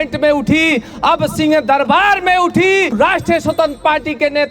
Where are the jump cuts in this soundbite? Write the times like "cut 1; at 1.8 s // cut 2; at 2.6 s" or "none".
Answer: cut 1; at 2.9 s